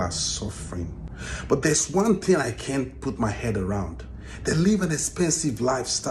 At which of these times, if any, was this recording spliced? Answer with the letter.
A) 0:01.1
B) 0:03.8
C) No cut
A